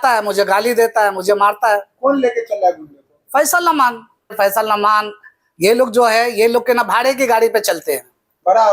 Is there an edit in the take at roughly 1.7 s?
no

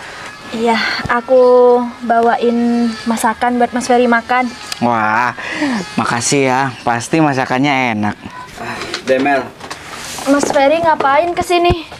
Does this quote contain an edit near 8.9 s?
yes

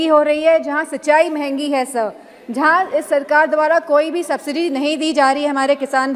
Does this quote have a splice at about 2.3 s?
no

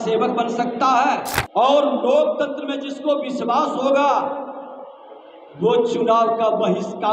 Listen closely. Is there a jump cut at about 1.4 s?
yes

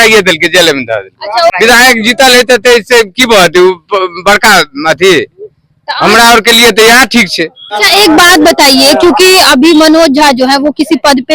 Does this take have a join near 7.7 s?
yes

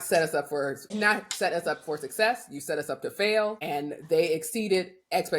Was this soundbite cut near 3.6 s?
yes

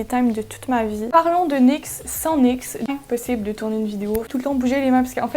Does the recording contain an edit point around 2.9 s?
yes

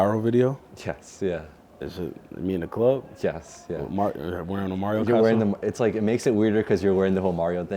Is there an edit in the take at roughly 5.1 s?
no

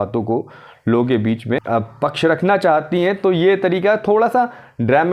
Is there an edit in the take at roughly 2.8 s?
no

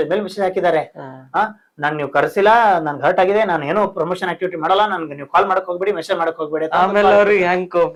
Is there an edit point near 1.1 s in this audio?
no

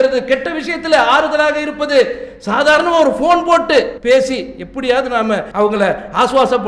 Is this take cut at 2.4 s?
no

